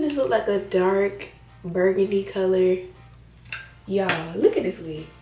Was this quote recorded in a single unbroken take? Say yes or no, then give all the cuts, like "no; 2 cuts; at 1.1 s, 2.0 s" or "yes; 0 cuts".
yes; 0 cuts